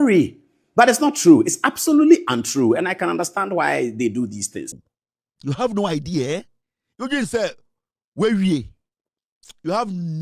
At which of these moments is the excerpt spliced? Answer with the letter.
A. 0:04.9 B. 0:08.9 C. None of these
A